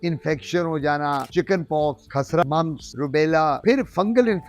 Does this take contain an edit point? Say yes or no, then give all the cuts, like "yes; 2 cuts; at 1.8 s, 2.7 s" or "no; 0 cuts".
yes; 3 cuts; at 1.3 s, 2.4 s, 3.6 s